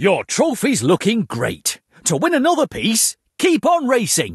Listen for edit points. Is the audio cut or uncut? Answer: uncut